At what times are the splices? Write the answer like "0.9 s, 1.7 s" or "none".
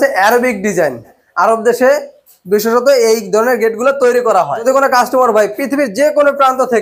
1.1 s, 4.6 s